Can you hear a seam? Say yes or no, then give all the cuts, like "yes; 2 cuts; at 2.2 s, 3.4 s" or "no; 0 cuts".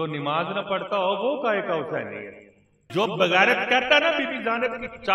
yes; 1 cut; at 2.8 s